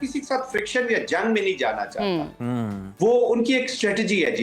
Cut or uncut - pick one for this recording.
uncut